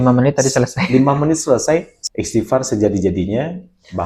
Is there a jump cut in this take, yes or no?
yes